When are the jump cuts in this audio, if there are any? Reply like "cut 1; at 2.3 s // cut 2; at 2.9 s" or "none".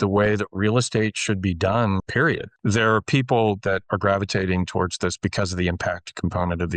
cut 1; at 2.1 s // cut 2; at 3.8 s